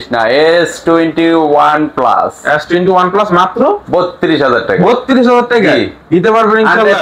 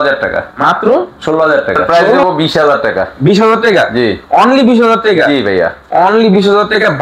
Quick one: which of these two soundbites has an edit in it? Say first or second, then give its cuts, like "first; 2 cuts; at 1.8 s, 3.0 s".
second; 1 cut; at 2.2 s